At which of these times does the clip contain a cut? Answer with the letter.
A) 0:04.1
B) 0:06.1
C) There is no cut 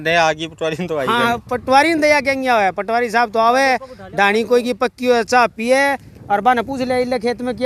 C